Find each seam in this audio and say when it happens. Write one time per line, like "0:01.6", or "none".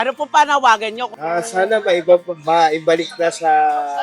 0:01.1